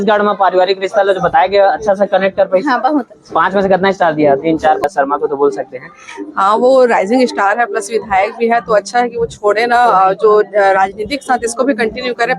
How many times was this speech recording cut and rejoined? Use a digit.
1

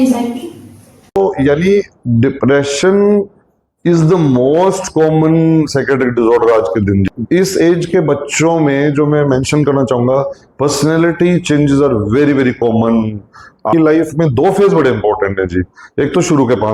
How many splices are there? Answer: 3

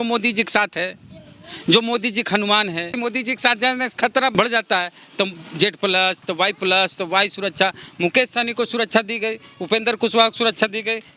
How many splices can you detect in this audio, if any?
1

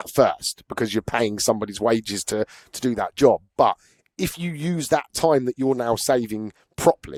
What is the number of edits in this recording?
0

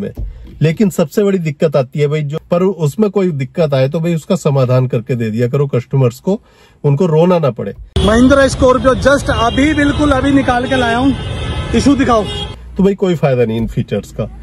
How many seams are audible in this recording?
3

